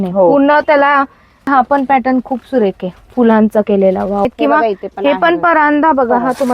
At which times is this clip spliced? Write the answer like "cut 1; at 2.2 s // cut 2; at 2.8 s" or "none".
cut 1; at 1.5 s // cut 2; at 4.2 s